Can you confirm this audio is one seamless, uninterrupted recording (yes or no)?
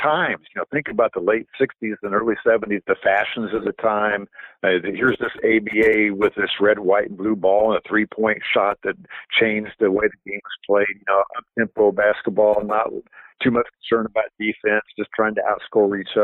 no